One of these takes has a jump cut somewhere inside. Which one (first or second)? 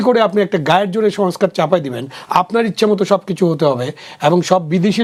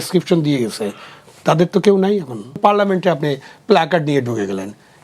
second